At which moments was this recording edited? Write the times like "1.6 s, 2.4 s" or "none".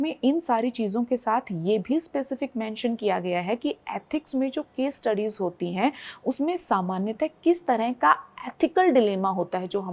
none

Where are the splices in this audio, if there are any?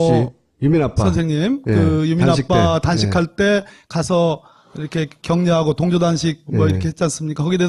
none

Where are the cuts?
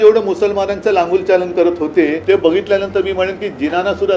2.2 s

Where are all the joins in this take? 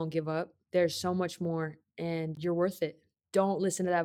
2.3 s

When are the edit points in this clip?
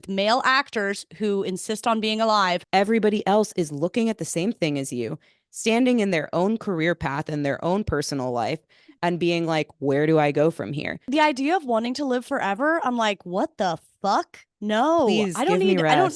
2.6 s, 11.1 s

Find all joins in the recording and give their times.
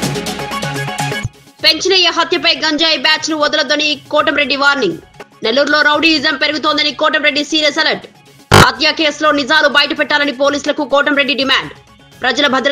1.2 s

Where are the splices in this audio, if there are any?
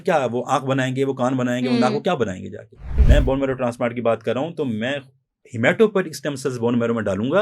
2.9 s

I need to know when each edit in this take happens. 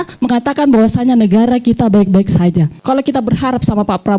2.8 s

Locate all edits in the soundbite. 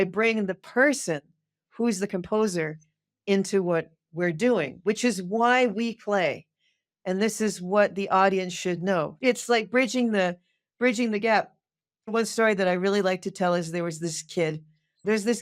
9.1 s, 12.1 s

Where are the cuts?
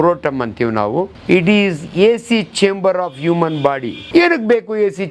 1.1 s, 3.9 s

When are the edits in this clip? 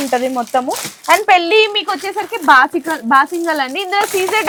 none

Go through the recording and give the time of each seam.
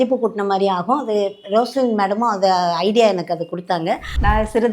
none

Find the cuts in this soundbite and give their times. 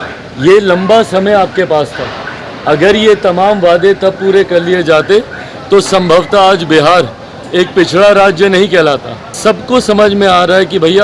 9.4 s

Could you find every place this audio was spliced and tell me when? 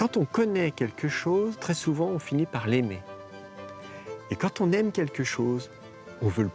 1.6 s

